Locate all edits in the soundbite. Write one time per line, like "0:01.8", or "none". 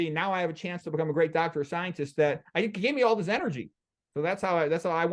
none